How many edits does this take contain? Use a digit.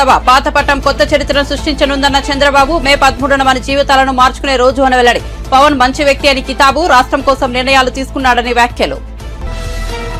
0